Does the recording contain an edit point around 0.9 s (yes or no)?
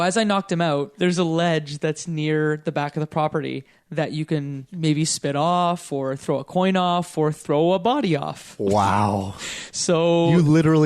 yes